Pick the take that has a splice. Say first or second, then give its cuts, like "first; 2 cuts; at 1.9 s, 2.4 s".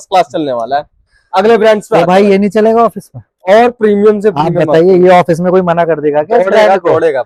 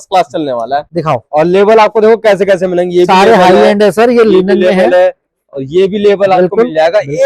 second; 1 cut; at 0.9 s